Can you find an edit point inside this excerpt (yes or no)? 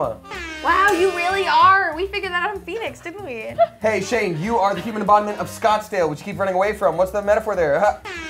no